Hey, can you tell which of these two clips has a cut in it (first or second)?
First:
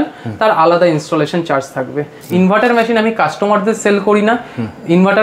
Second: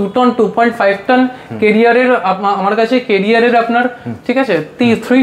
first